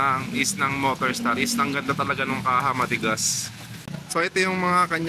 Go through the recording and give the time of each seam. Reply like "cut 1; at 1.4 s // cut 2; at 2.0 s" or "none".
cut 1; at 4.0 s